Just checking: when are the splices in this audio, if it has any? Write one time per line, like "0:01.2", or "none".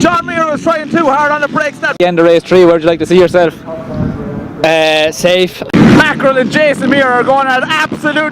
0:02.0
0:05.7